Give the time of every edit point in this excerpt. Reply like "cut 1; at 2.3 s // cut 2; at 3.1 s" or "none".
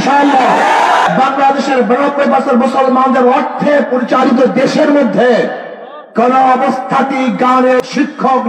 cut 1; at 1.1 s // cut 2; at 7.8 s